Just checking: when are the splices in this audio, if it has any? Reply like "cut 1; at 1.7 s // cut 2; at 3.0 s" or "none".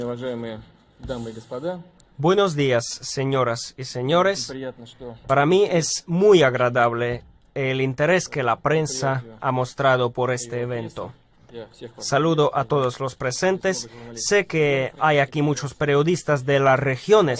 cut 1; at 14.9 s